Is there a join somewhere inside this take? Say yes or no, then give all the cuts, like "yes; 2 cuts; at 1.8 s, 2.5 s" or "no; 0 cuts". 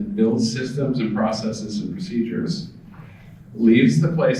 no; 0 cuts